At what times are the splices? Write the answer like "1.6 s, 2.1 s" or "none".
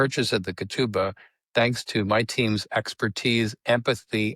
none